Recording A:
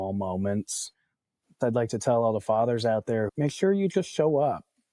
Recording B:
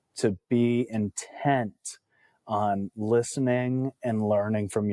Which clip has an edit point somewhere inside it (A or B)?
A